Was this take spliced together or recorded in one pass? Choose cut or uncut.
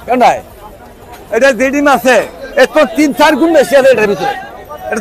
uncut